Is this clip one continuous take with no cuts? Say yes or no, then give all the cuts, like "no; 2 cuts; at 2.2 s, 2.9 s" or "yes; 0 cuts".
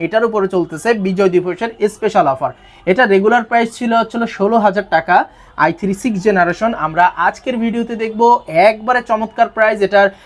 yes; 0 cuts